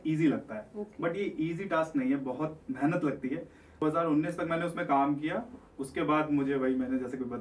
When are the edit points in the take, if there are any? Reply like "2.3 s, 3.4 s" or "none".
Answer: 3.8 s